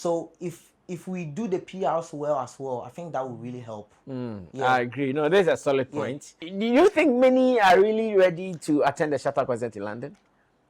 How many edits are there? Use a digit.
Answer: 1